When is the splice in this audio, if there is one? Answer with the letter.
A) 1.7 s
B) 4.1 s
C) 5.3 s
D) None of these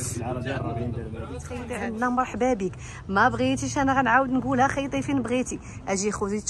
A